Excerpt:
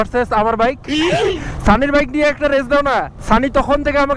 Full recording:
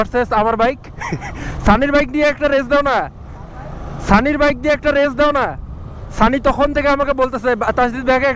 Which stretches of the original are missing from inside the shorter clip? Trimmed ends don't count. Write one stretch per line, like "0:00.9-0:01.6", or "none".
0:03.1-0:06.0